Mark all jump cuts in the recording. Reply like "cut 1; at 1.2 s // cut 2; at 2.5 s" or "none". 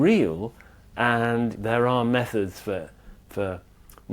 cut 1; at 1.5 s